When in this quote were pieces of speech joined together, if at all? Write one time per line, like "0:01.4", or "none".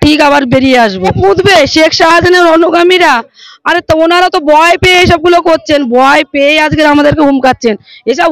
0:01.2

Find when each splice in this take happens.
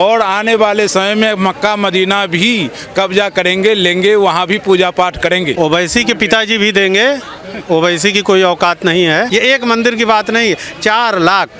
0:05.5
0:09.3

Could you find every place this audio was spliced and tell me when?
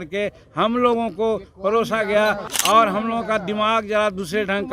0:02.5

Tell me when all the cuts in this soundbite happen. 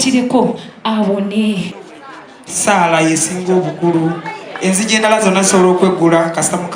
0:01.7

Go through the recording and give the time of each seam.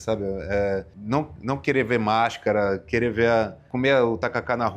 0:00.9
0:03.6

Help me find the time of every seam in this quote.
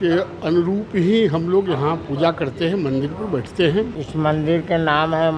0:04.0

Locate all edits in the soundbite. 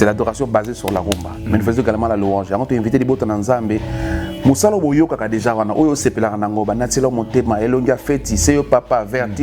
0:01.6

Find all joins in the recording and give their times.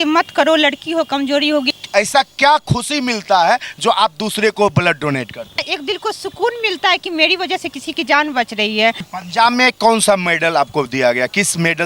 0:01.7
0:05.7
0:09.1

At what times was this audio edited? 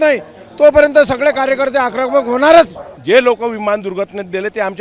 0:02.9

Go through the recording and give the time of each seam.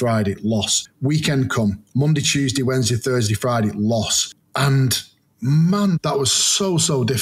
0:06.0

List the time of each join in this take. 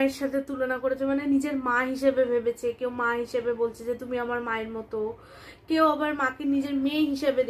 none

